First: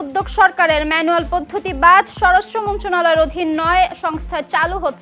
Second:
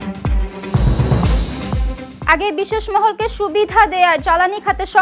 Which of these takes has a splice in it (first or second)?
second